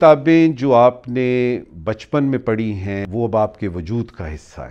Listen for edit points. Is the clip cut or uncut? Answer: cut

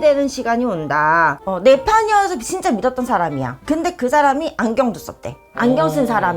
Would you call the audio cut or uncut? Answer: cut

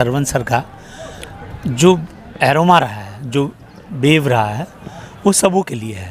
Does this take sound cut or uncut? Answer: uncut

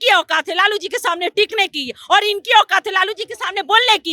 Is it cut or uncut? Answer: uncut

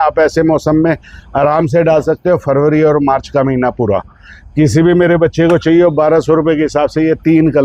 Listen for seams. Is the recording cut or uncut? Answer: uncut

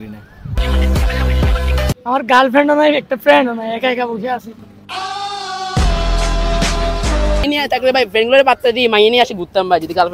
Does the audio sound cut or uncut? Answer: cut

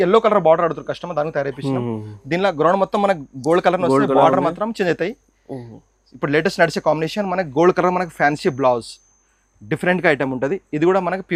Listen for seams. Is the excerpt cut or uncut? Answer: uncut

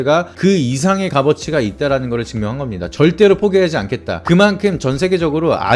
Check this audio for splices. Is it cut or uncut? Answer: uncut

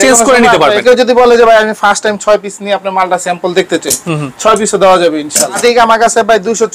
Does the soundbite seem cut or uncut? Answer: cut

